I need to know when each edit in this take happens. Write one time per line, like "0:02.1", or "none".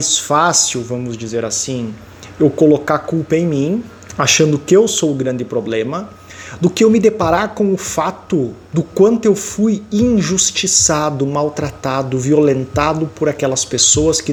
none